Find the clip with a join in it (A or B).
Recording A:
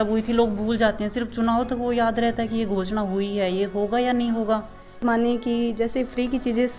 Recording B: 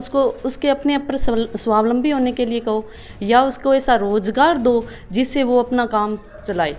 A